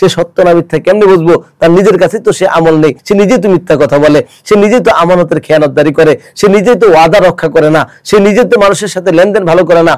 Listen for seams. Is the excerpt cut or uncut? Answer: cut